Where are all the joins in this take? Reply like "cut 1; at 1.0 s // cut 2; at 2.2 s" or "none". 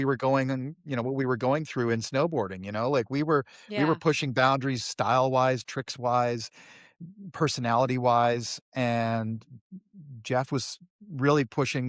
none